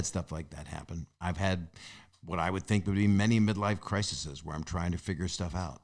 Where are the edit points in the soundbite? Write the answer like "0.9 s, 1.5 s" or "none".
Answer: none